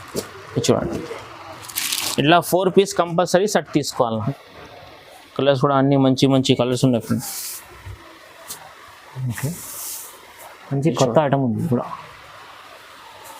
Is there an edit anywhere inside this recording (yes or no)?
yes